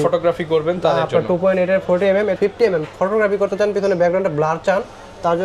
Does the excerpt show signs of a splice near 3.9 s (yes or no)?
no